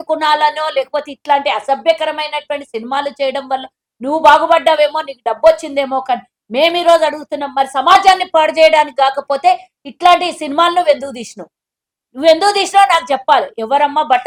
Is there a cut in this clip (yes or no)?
no